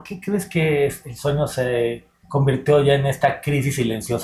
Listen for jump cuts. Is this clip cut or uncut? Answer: uncut